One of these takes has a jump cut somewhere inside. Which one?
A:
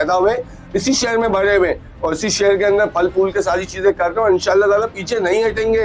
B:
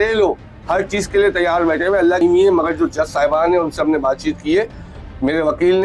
B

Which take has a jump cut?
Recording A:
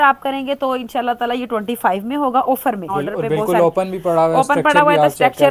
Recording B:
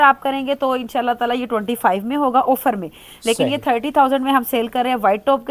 A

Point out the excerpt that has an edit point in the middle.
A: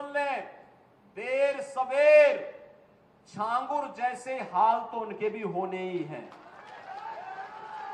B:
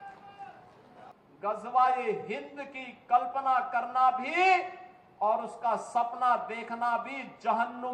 B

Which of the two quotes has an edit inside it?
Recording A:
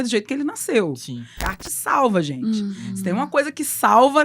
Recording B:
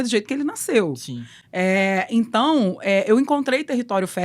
A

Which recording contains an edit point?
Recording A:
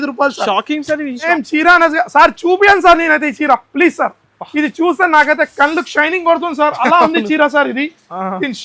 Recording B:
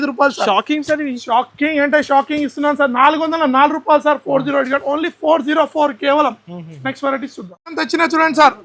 A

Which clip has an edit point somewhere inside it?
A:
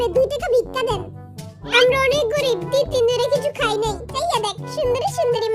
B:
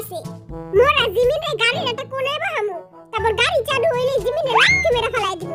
A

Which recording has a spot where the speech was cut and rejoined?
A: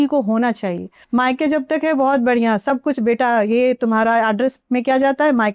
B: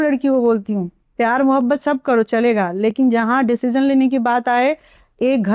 A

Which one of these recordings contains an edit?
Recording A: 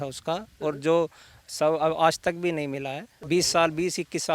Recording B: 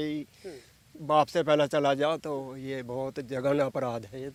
A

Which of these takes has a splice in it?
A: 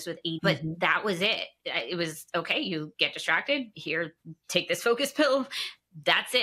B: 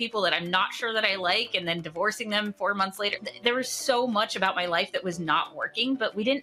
B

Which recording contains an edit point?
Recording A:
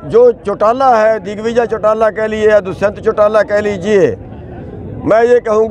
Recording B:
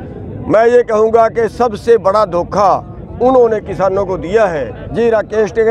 B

